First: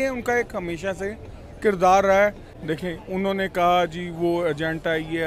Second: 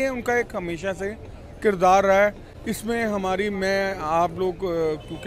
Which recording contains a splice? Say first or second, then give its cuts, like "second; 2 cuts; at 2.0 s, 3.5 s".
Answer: first; 1 cut; at 2.5 s